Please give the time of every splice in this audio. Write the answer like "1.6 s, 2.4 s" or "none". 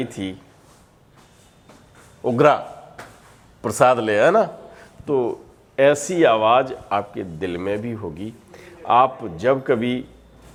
none